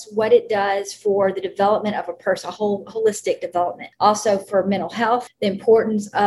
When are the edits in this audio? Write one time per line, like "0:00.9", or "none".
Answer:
0:03.8
0:05.3